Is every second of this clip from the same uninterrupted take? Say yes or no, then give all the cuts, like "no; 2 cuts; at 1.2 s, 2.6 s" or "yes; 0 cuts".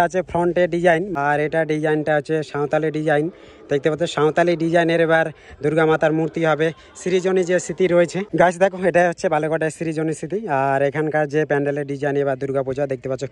no; 2 cuts; at 1.1 s, 8.2 s